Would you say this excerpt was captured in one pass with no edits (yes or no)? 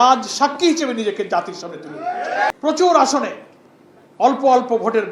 no